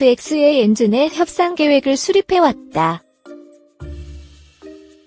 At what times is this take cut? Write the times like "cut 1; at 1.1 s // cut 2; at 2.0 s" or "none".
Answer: cut 1; at 3.1 s